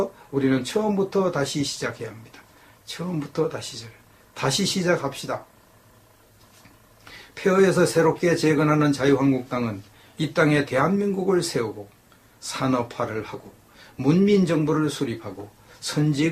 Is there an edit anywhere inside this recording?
yes; 1 cut; at 5.7 s

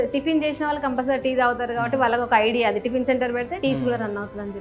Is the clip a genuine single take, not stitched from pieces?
no; 1 cut; at 3.5 s

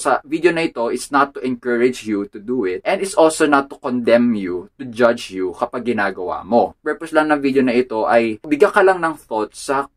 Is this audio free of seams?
no; 2 cuts; at 6.8 s, 8.5 s

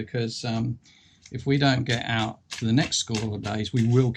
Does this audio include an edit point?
no; 0 cuts

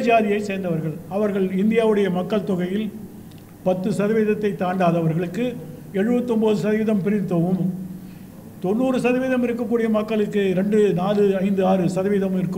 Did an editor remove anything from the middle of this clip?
no; 0 cuts

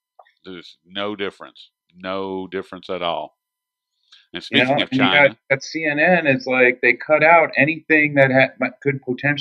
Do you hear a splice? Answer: yes; 1 cut; at 7.6 s

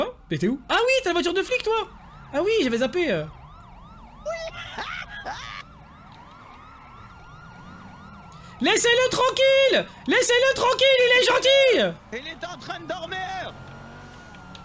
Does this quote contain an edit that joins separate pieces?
no; 0 cuts

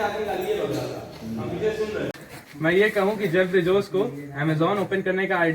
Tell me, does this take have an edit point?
yes; 1 cut; at 2.2 s

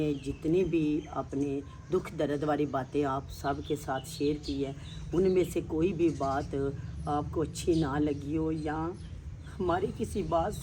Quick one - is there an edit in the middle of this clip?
no; 0 cuts

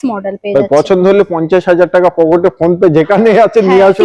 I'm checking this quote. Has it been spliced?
no; 0 cuts

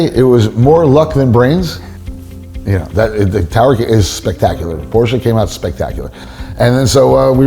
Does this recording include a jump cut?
yes; 1 cut; at 6.2 s

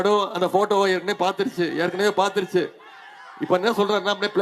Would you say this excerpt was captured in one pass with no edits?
yes; 0 cuts

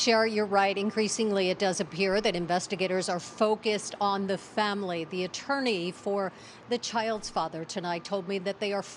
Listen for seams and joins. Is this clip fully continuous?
no; 2 cuts; at 1.6 s, 3.5 s

